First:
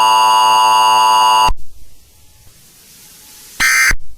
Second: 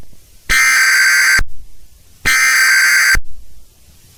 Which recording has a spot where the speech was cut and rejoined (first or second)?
first